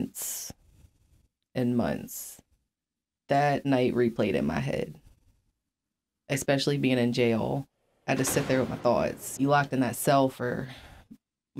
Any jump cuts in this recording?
yes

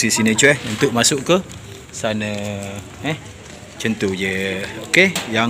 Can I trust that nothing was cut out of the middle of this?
yes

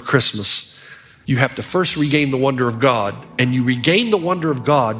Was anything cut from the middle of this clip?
no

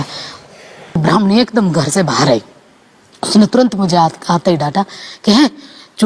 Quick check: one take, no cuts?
no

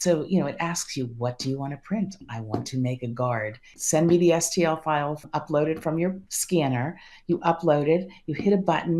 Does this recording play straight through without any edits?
no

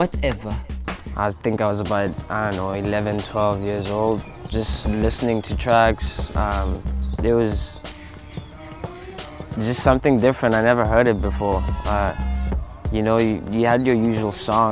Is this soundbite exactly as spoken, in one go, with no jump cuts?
no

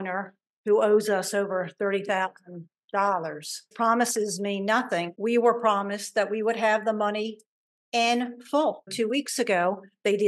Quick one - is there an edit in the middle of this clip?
yes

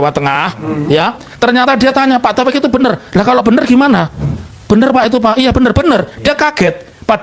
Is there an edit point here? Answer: no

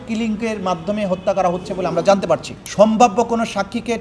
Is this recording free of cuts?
no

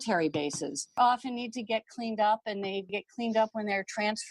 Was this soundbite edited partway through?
yes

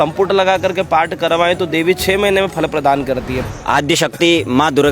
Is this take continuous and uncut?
no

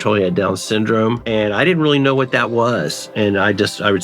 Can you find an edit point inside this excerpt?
yes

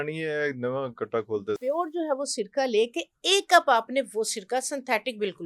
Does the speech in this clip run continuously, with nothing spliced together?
no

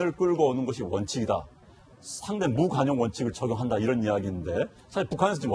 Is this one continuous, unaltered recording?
no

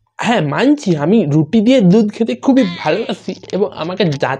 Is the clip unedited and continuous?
yes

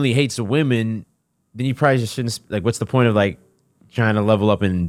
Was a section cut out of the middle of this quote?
no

